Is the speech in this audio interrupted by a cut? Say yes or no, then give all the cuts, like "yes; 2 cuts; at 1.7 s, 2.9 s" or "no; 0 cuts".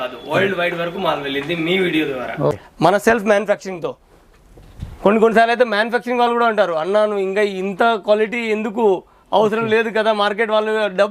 yes; 1 cut; at 2.5 s